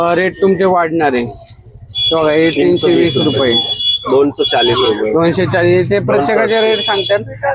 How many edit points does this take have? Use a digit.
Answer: 0